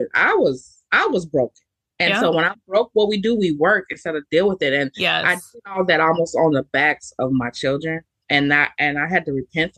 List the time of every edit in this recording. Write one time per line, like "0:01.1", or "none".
none